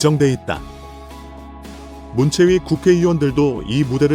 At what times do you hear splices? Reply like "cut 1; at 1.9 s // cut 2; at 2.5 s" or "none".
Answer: none